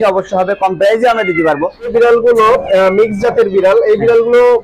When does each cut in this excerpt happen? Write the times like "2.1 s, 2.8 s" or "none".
1.9 s

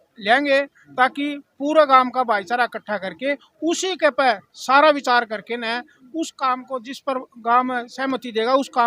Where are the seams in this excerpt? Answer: none

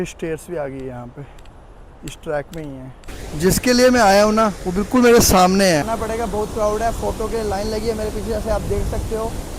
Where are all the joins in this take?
5.9 s

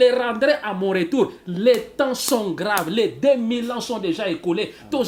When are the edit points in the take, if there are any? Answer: none

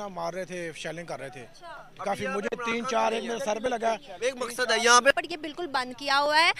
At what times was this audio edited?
5.1 s

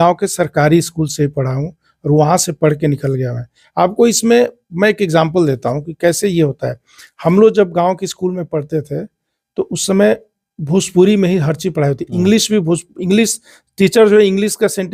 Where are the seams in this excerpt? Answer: none

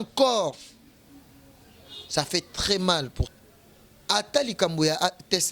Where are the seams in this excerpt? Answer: 3.2 s

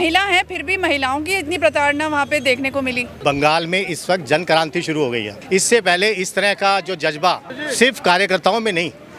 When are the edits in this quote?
3.1 s, 5.3 s, 7.6 s

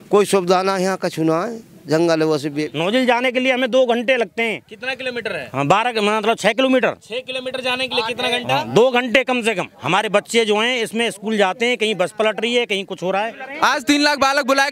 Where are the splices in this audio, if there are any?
2.7 s, 9.7 s, 13.4 s

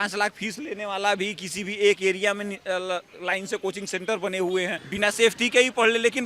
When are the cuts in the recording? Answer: 4.8 s

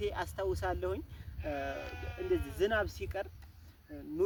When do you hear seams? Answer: none

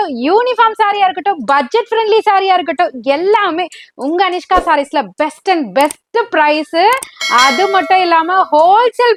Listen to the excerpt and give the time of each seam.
none

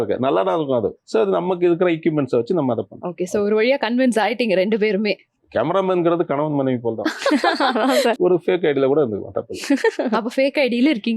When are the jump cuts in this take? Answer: 8.1 s

